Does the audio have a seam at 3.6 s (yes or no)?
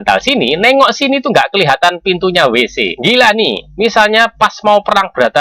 yes